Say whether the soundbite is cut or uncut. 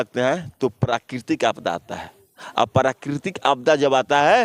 uncut